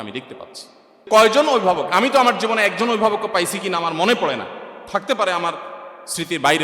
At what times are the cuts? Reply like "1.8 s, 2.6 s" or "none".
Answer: 1.0 s